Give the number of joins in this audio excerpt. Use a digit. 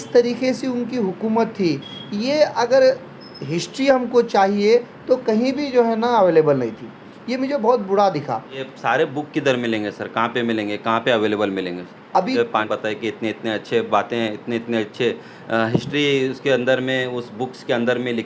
2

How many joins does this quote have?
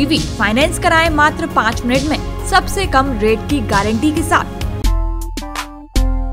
1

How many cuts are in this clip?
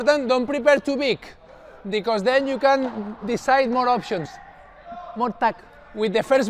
0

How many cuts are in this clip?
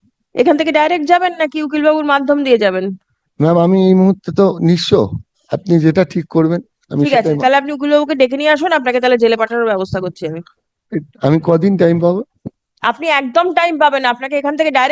0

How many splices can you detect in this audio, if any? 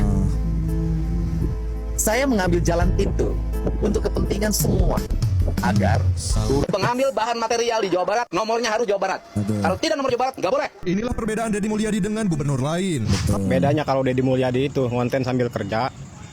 2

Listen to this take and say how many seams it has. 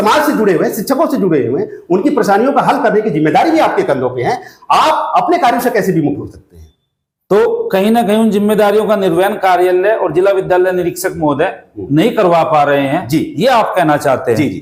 0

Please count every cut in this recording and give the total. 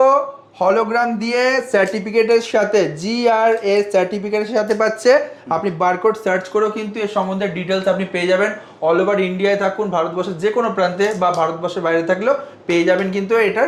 0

